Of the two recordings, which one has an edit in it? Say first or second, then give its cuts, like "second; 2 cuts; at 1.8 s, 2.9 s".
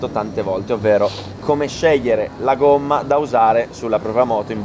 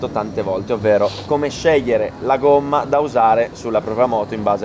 second; 1 cut; at 1.2 s